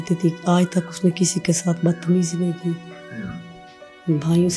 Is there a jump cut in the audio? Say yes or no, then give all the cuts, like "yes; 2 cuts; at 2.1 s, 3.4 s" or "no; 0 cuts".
no; 0 cuts